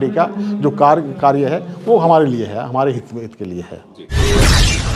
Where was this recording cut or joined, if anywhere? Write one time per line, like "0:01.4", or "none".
0:04.0